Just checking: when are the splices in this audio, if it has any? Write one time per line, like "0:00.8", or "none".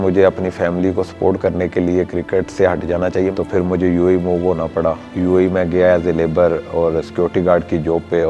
0:03.3